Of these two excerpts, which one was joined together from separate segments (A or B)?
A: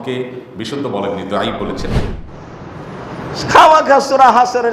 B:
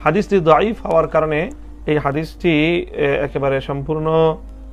A